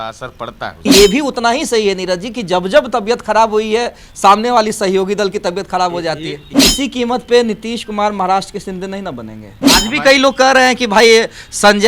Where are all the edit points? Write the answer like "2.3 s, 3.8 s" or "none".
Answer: 0.9 s, 6.5 s, 9.5 s

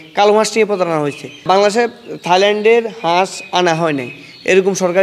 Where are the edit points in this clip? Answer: 1.4 s

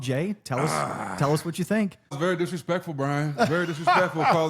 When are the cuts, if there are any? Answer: 2.1 s

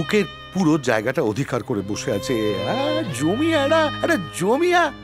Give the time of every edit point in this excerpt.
none

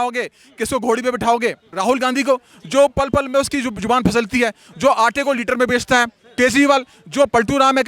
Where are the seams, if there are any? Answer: 1.7 s

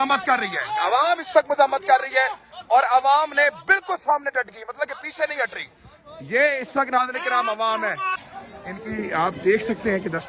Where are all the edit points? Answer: 8.2 s

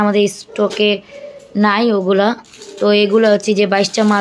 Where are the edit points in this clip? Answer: none

